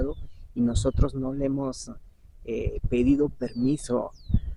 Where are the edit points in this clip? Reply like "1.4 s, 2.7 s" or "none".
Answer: none

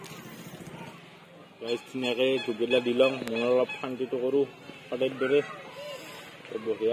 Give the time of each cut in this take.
0.9 s

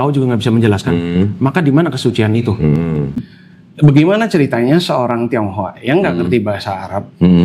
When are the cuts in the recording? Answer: 3.3 s

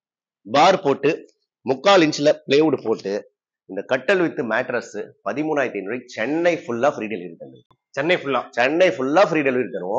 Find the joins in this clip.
none

